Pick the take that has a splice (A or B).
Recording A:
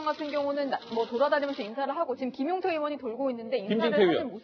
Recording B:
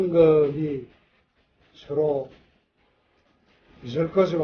B